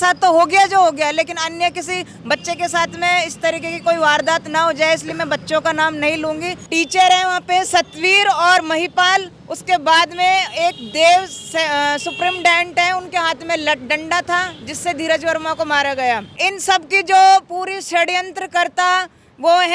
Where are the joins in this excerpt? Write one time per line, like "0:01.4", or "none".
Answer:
0:06.6
0:16.4